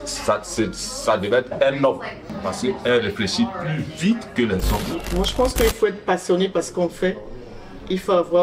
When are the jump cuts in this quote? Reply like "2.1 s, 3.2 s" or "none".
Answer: 2.3 s, 5.0 s